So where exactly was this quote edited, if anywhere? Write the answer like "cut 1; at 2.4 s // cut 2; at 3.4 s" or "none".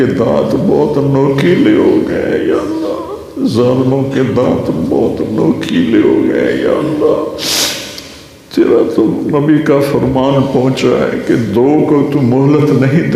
none